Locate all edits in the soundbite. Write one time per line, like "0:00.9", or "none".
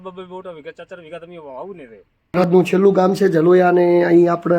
0:02.4